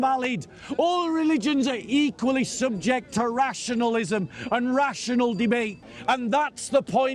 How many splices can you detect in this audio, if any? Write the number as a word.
one